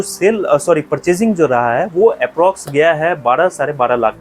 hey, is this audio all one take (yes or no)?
yes